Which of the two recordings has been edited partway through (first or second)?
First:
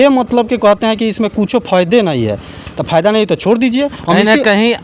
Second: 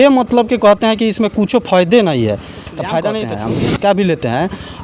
second